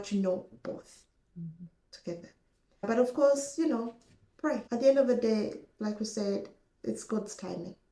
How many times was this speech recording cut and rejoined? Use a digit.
2